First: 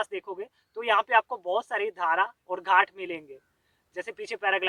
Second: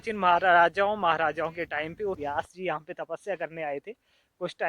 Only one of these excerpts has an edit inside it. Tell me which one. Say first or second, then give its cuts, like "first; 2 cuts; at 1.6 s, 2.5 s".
second; 1 cut; at 2.2 s